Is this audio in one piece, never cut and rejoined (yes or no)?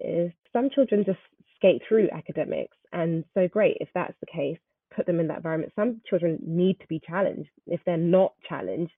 yes